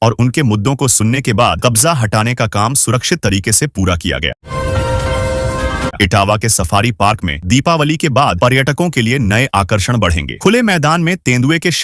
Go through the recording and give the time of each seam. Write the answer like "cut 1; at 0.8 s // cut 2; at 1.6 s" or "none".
cut 1; at 4.3 s // cut 2; at 5.9 s // cut 3; at 7.4 s